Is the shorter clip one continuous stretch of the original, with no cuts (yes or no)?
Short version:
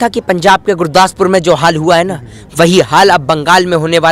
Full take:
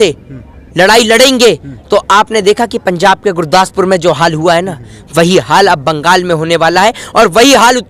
yes